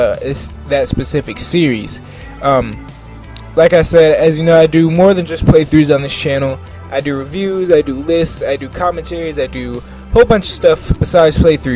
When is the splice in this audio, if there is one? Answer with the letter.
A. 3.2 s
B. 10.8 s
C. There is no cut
B